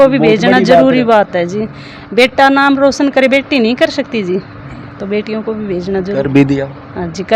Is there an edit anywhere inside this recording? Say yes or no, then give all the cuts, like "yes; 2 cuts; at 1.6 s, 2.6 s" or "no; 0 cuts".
no; 0 cuts